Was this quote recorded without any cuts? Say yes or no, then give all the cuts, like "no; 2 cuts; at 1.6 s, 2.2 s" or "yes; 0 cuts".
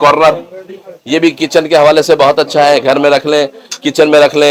yes; 0 cuts